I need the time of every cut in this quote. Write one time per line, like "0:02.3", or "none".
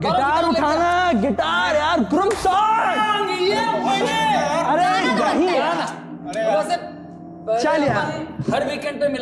none